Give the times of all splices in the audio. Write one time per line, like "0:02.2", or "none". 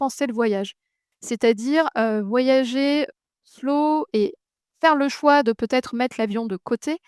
0:01.1